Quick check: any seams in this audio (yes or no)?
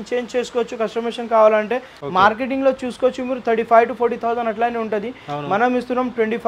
yes